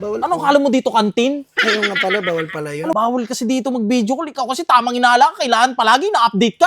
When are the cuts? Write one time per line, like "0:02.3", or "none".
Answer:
0:02.9